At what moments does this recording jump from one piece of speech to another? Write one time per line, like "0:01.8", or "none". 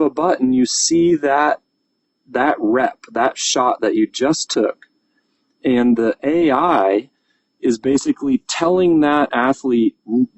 none